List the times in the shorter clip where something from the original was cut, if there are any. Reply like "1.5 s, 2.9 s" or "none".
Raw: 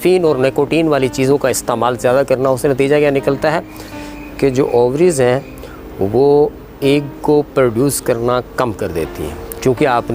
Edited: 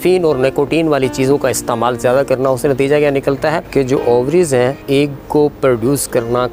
3.6 s, 4.8 s